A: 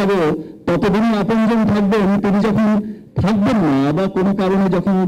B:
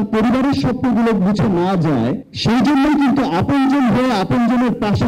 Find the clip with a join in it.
B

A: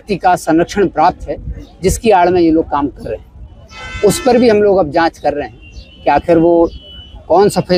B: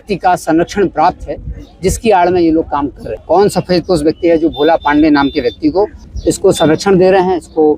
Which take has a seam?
B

